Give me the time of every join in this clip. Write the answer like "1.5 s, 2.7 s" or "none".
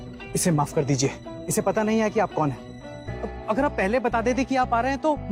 none